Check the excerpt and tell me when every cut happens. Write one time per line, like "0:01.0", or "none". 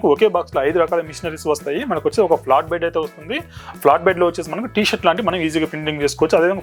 none